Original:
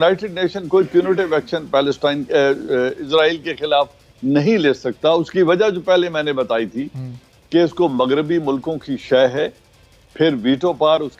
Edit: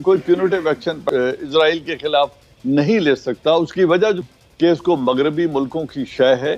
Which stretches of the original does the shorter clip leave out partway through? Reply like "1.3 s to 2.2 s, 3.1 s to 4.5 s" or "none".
1.7 s to 2.6 s, 5.8 s to 7.1 s